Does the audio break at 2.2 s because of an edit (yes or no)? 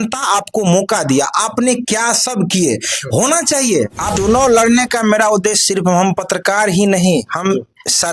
no